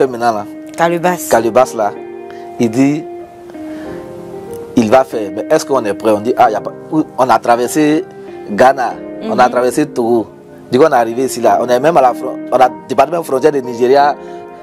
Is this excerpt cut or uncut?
uncut